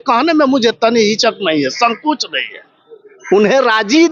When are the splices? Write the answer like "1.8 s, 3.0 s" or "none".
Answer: none